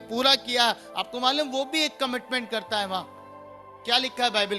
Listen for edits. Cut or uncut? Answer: uncut